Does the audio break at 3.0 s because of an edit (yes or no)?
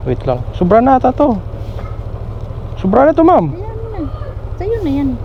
no